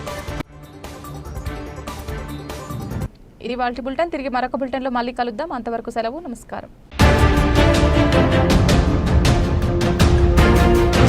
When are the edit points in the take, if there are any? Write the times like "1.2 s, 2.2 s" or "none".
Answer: none